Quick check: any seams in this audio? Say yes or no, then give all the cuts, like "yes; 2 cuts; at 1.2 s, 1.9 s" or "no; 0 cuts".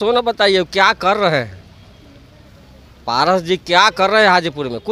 no; 0 cuts